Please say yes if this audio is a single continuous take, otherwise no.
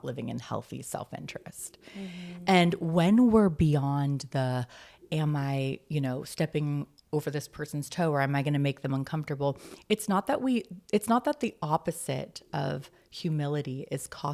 yes